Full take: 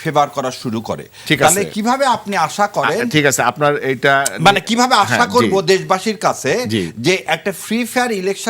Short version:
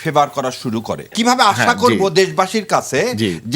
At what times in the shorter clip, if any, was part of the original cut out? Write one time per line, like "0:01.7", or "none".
0:01.1

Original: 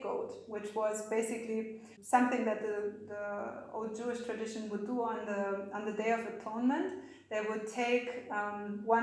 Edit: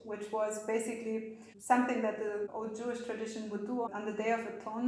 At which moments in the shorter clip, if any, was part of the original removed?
0:02.5
0:03.9

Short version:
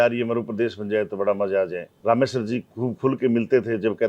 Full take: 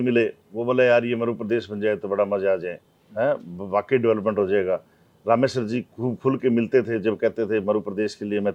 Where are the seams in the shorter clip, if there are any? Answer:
0:01.9

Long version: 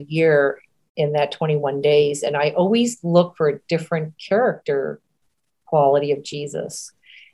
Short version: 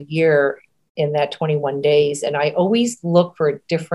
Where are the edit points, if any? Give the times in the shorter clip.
none

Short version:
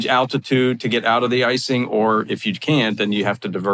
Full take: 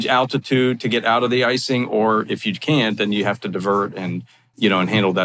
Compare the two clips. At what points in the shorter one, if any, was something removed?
none

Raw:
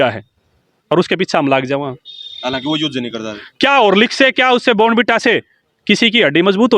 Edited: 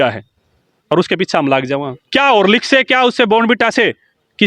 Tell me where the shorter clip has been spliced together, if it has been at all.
0:02.0

